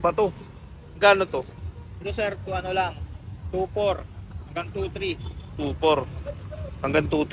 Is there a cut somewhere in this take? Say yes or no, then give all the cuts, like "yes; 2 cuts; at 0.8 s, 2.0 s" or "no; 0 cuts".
no; 0 cuts